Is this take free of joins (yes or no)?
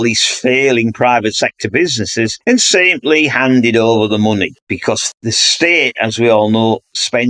no